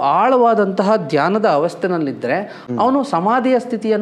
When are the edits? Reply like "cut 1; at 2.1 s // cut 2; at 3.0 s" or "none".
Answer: cut 1; at 2.6 s